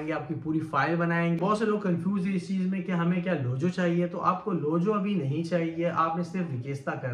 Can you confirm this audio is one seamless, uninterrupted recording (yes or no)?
no